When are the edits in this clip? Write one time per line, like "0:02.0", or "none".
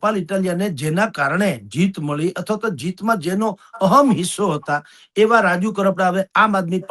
none